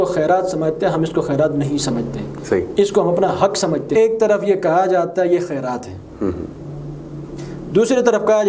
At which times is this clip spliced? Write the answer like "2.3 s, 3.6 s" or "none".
3.9 s